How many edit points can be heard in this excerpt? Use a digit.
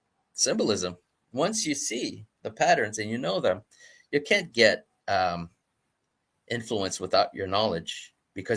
0